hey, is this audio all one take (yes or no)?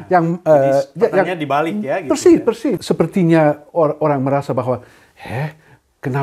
no